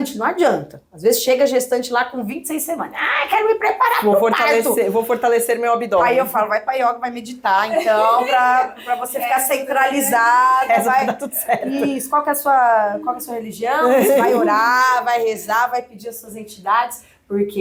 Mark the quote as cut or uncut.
uncut